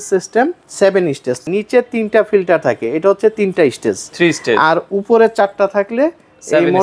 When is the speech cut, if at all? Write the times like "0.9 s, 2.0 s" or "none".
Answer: 1.4 s